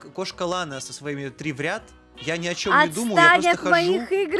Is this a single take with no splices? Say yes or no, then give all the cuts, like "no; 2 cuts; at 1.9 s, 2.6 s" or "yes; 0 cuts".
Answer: yes; 0 cuts